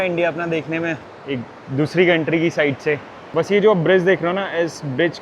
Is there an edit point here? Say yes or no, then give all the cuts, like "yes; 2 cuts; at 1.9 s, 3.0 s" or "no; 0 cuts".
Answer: yes; 2 cuts; at 1.1 s, 3.1 s